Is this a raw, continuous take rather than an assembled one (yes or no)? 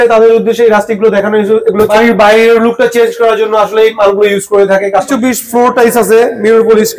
no